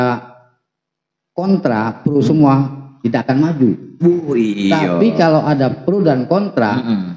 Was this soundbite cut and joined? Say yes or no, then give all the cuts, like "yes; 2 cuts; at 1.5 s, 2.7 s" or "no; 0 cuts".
no; 0 cuts